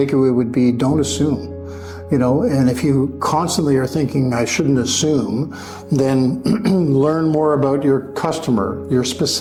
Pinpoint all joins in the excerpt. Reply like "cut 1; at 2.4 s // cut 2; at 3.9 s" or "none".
none